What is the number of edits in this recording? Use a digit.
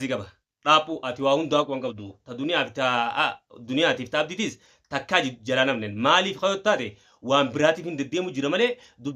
0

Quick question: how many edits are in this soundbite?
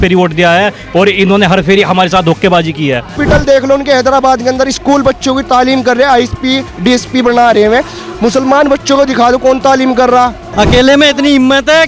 2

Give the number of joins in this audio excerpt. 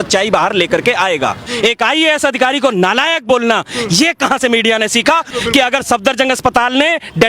2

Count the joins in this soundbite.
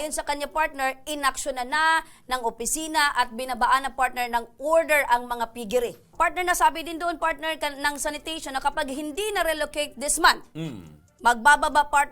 1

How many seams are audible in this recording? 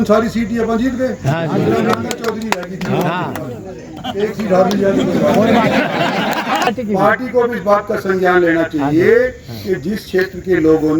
1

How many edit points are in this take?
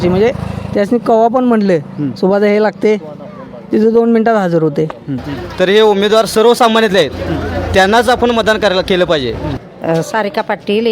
2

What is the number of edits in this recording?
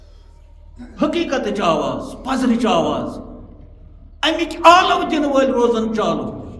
0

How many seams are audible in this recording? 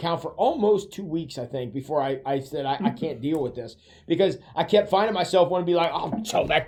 0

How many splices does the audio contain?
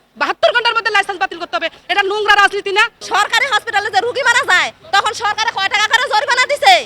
1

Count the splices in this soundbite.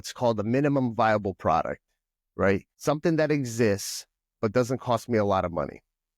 1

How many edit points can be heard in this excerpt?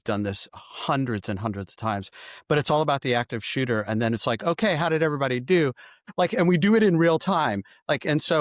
1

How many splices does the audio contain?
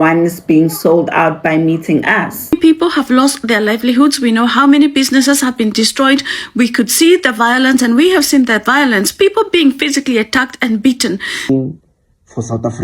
2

